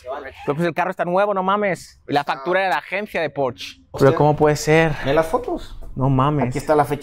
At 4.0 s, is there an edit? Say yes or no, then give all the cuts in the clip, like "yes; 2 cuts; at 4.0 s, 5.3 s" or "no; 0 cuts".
yes; 1 cut; at 4.0 s